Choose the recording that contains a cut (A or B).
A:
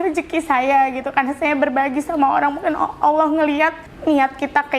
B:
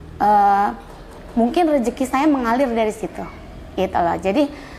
A